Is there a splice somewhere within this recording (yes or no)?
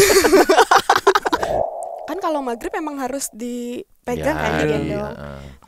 yes